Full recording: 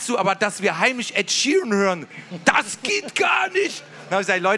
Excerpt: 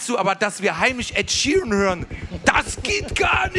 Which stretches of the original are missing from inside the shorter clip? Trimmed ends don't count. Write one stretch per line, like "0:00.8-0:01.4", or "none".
none